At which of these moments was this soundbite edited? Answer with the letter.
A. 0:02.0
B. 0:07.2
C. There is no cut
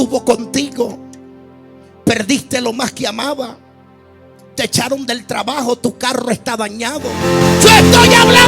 B